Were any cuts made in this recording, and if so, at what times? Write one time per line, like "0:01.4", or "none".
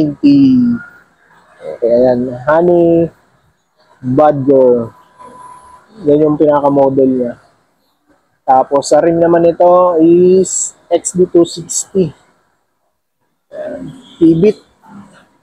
none